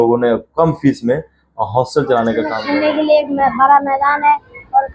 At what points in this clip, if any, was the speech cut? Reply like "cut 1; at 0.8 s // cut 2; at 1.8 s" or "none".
cut 1; at 2.6 s